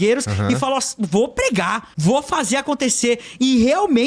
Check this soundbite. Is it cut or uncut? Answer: cut